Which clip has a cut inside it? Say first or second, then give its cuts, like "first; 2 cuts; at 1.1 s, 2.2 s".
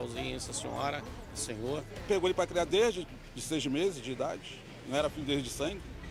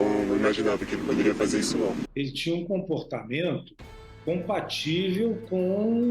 second; 1 cut; at 2.1 s